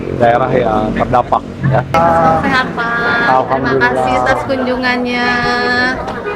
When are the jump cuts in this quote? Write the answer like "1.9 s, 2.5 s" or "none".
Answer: 1.9 s